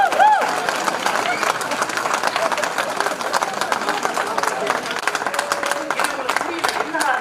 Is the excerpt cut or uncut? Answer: cut